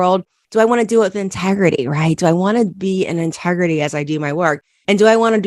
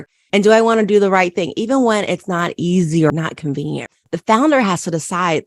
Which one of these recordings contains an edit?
second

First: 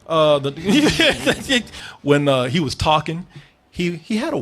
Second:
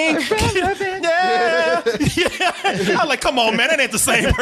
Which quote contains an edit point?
first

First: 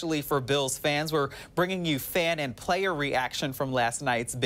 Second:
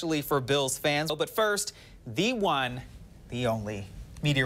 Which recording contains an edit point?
second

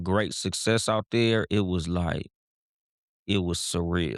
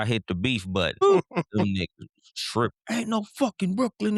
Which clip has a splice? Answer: second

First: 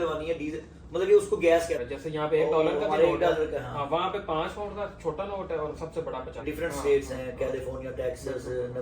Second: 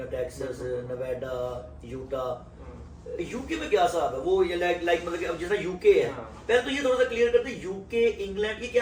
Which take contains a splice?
first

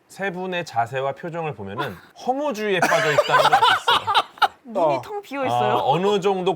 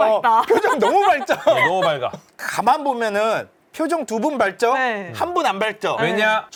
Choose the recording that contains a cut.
first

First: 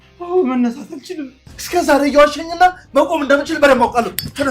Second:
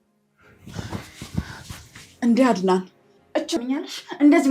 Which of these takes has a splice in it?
second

